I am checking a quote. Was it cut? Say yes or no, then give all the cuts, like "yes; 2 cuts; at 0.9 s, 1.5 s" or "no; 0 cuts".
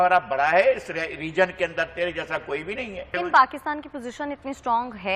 yes; 1 cut; at 3.2 s